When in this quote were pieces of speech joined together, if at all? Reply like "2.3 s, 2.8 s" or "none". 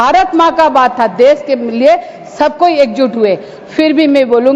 none